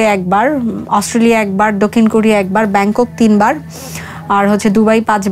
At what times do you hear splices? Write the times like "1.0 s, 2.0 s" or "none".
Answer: none